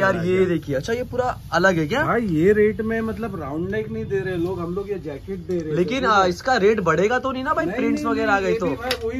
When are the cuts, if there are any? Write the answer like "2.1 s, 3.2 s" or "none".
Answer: none